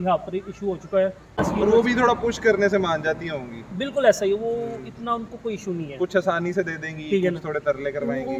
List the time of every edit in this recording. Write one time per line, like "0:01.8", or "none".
0:01.4